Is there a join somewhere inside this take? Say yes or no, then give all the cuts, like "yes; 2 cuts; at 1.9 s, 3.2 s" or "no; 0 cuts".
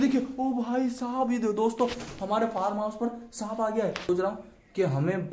yes; 1 cut; at 4.1 s